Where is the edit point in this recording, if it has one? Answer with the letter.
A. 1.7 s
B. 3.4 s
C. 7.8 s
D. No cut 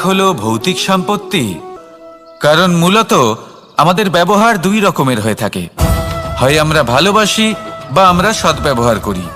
A